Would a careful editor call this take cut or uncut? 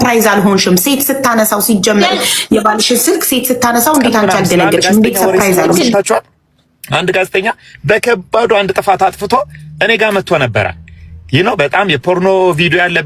cut